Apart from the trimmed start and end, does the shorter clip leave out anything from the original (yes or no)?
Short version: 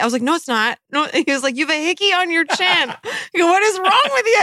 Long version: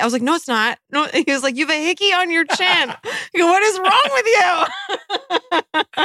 no